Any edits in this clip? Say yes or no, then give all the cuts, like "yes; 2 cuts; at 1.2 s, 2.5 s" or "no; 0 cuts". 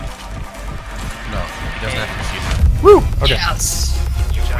no; 0 cuts